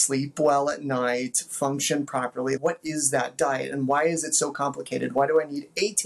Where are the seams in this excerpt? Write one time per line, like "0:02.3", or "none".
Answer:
none